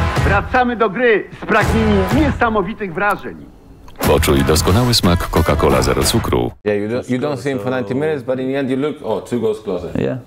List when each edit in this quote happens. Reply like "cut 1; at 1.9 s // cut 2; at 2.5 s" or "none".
cut 1; at 6.6 s